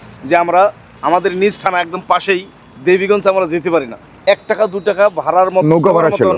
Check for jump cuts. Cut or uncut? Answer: uncut